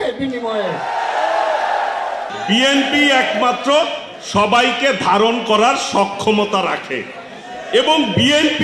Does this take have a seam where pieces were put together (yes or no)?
yes